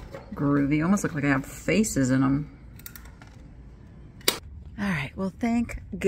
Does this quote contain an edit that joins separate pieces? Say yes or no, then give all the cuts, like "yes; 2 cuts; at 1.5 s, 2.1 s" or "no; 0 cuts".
yes; 1 cut; at 4.8 s